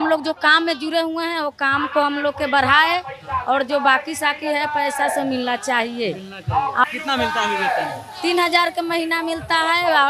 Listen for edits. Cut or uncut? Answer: cut